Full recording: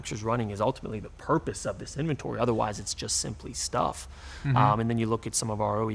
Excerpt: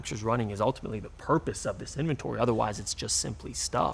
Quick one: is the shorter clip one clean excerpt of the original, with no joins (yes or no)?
yes